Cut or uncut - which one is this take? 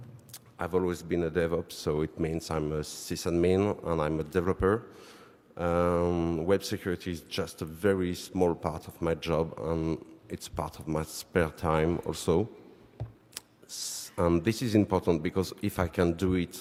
uncut